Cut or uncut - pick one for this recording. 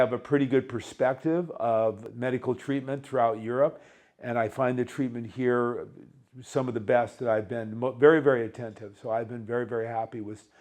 cut